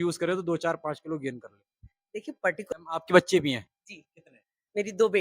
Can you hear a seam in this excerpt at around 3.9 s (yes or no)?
no